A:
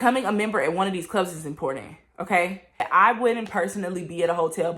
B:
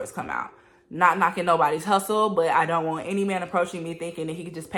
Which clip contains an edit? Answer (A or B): A